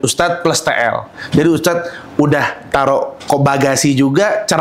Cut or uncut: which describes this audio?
uncut